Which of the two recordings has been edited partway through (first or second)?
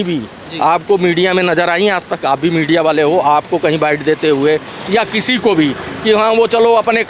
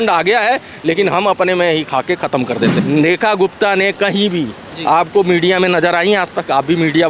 second